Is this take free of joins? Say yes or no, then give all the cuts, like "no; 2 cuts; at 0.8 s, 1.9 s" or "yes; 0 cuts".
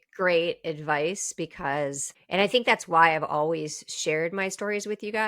no; 1 cut; at 2.1 s